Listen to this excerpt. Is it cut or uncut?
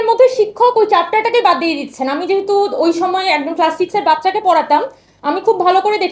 uncut